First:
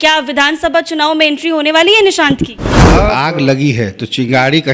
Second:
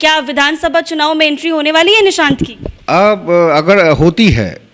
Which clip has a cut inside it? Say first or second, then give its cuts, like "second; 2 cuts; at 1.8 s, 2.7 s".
first; 1 cut; at 3.1 s